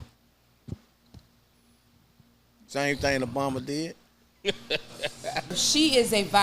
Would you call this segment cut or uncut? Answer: cut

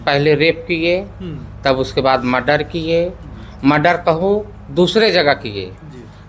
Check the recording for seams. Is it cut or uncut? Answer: uncut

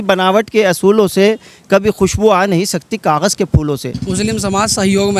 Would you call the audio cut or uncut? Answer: cut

